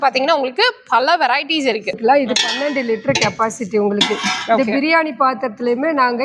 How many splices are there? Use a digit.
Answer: 1